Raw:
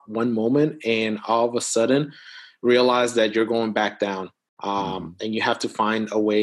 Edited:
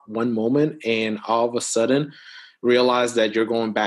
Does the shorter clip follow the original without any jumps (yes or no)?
yes